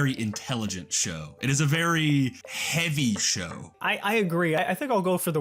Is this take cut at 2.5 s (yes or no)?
yes